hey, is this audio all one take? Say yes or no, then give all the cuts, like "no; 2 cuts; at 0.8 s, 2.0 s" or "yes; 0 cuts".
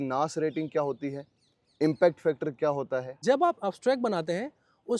no; 1 cut; at 3.1 s